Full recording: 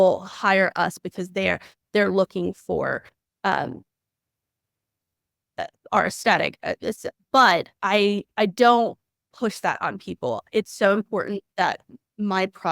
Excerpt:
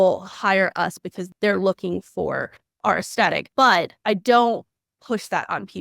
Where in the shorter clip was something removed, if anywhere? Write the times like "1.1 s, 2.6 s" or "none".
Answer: 1.2 s, 2.6 s, 3.9 s